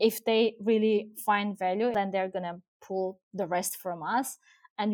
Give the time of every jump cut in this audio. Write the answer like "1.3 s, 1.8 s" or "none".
1.9 s